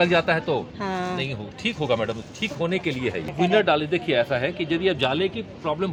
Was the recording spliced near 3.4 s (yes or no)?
no